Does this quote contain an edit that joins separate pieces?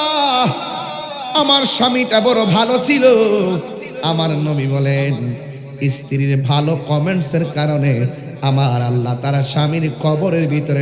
no; 0 cuts

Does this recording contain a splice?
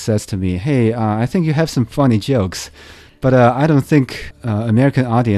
yes; 1 cut; at 4.3 s

